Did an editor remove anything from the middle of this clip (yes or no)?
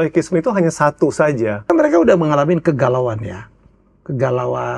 yes